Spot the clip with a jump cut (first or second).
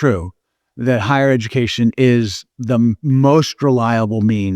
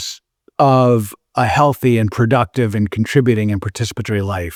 first